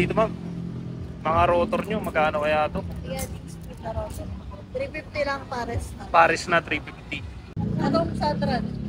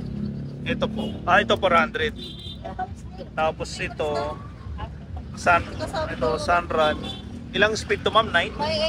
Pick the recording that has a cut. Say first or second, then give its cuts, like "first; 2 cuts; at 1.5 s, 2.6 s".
first; 1 cut; at 7.6 s